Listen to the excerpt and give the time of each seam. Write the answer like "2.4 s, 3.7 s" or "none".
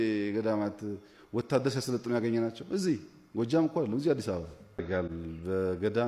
4.8 s

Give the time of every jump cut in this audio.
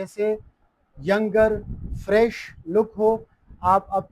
none

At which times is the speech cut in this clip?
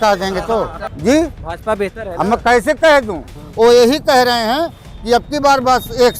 0.9 s, 3.4 s

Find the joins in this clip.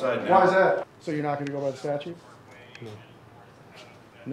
0.9 s

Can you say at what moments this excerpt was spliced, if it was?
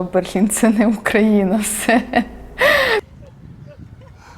none

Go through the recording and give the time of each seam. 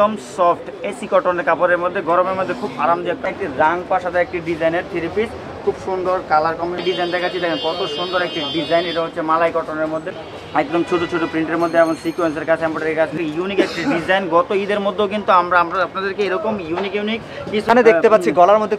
3.2 s, 6.8 s, 10.2 s, 13.1 s, 17.7 s

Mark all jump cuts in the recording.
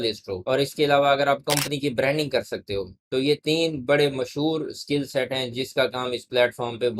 none

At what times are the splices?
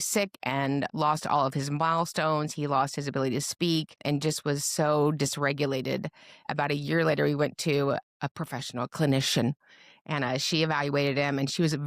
0.9 s, 4.0 s, 6.5 s, 8.0 s

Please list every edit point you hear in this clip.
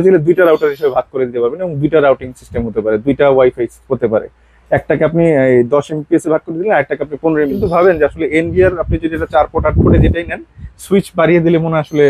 7.6 s

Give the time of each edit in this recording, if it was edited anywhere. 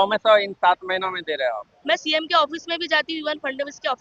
1.7 s

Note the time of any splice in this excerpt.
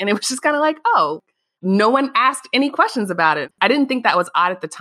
3.5 s

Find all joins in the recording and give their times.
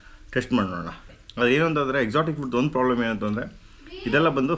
1.2 s

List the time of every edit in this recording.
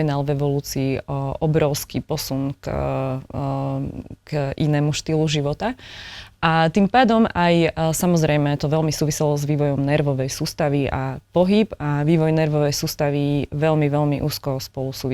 none

